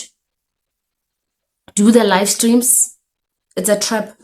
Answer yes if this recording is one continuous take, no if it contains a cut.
yes